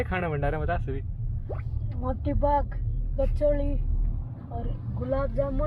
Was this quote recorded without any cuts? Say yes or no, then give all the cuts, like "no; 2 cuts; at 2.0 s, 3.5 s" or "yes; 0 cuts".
yes; 0 cuts